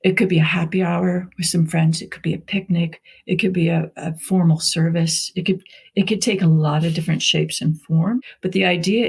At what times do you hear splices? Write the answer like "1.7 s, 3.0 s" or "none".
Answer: 8.2 s